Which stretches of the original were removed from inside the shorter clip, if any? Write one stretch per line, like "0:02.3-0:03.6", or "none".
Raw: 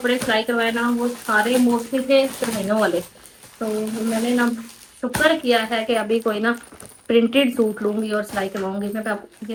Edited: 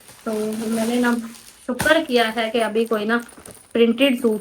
none